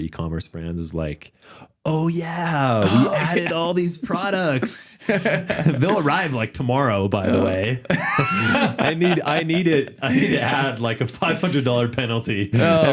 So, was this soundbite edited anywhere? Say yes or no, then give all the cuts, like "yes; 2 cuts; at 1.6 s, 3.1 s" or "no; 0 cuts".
no; 0 cuts